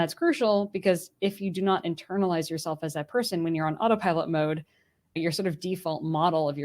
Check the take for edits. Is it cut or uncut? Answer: cut